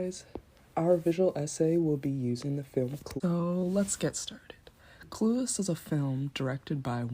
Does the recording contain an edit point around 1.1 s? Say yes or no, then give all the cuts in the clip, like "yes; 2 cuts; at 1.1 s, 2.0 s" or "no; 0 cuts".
no; 1 cut; at 3.0 s